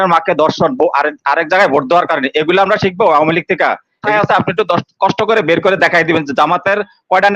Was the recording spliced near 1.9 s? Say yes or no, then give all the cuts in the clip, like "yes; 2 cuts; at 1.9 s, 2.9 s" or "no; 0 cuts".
no; 1 cut; at 4.1 s